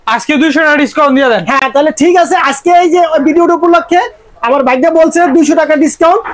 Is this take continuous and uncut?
yes; 0 cuts

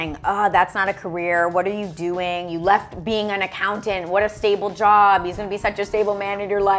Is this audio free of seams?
yes; 0 cuts

